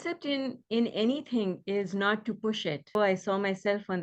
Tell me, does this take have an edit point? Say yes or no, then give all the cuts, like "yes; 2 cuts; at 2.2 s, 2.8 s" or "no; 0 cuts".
yes; 1 cut; at 3.0 s